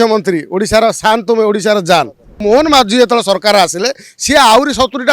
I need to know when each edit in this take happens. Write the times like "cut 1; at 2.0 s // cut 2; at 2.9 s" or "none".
cut 1; at 2.4 s